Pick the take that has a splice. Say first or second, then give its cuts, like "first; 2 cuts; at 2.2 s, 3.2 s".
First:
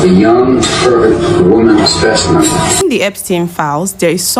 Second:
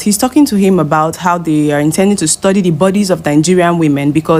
first; 1 cut; at 2.8 s